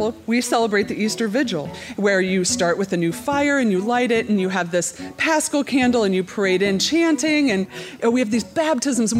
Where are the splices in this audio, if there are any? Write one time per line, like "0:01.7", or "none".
0:01.8
0:07.9